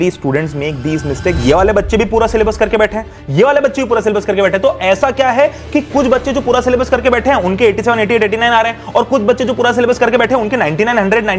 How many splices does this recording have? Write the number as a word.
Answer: one